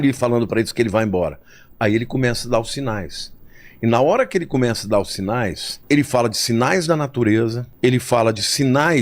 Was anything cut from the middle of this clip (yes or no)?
yes